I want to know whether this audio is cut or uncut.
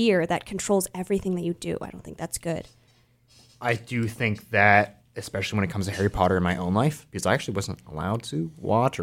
uncut